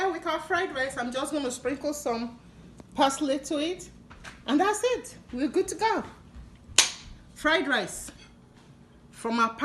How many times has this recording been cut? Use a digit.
0